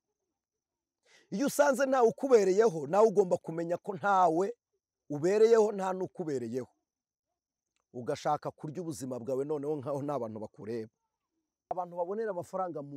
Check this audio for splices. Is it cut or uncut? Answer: cut